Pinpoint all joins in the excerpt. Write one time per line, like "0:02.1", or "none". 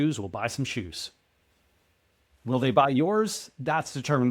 none